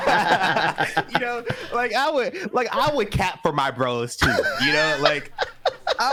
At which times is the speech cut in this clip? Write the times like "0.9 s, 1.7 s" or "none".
none